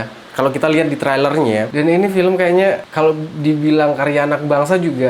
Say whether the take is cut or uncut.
cut